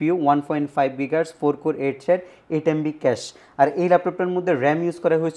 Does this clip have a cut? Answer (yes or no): no